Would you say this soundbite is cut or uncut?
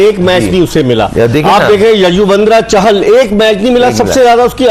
uncut